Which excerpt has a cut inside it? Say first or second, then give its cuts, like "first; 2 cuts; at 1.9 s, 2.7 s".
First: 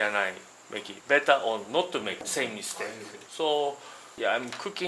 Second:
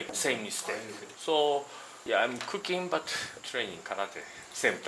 first; 1 cut; at 0.9 s